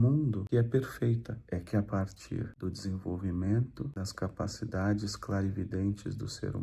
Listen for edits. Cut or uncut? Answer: cut